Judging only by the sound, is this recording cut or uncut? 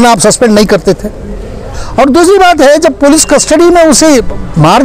cut